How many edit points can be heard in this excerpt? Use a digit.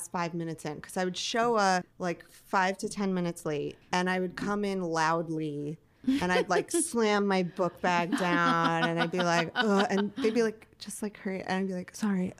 2